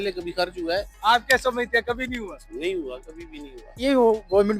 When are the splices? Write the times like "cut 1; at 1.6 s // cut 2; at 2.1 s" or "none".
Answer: cut 1; at 0.9 s // cut 2; at 3.8 s